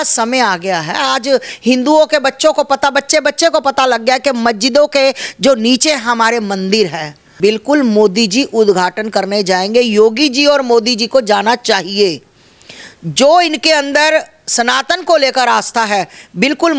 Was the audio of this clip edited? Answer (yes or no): yes